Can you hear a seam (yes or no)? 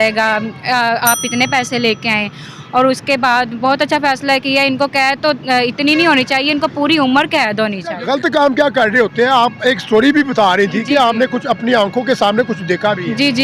yes